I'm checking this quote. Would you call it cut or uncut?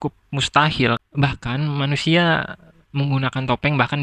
cut